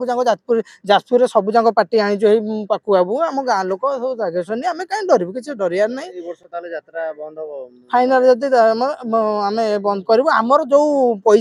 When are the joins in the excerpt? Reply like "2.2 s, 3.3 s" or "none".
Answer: none